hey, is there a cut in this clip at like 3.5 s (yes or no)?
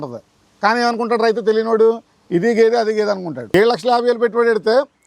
yes